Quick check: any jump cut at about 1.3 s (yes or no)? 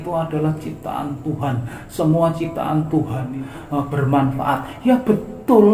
no